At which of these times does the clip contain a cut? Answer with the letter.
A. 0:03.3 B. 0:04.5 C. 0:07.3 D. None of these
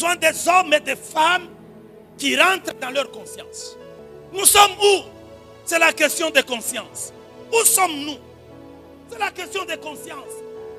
B